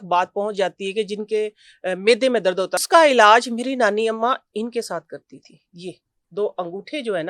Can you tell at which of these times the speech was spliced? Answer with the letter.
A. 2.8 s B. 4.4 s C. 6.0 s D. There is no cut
A